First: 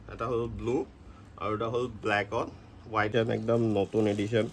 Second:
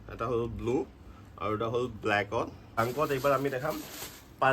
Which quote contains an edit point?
first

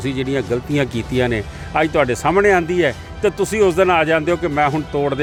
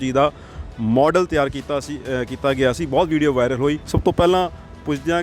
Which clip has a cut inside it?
second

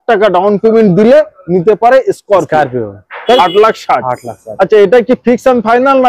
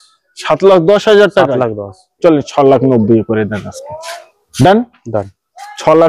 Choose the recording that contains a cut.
first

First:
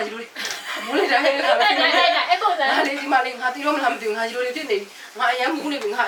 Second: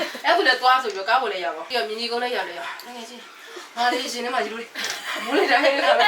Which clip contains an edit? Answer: second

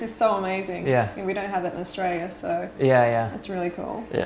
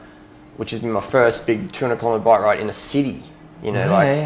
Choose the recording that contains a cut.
first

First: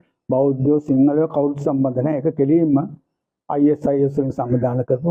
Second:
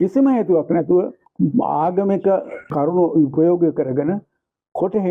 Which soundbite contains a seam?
second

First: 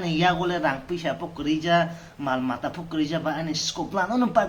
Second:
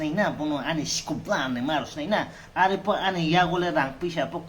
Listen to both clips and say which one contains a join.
second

